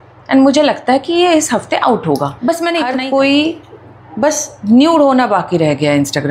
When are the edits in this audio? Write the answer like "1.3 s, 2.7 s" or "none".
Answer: 2.9 s